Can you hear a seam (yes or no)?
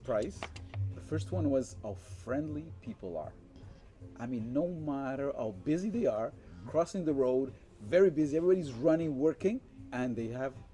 no